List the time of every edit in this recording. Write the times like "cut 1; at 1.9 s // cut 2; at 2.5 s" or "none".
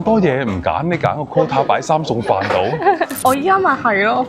cut 1; at 3.1 s